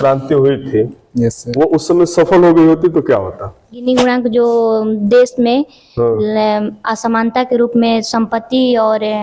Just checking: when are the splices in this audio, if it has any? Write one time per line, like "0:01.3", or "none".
0:03.9